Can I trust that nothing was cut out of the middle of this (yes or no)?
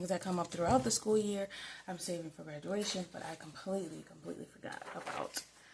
yes